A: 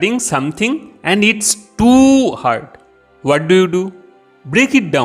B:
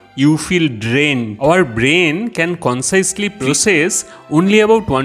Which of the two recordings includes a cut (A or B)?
B